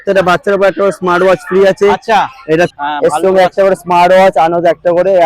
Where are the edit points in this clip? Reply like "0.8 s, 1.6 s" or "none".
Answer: 2.7 s